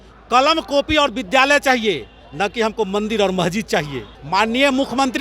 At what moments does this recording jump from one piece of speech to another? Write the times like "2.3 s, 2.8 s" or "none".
4.1 s